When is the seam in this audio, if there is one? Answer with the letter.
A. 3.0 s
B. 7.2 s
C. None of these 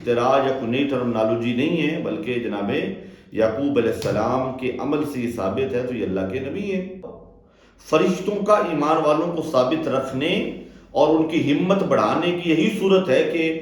B